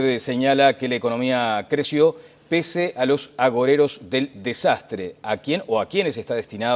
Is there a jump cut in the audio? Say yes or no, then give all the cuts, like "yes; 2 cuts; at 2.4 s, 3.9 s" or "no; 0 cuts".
no; 0 cuts